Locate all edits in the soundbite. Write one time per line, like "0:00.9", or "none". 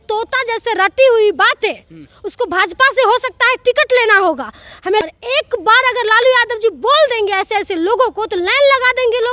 0:05.0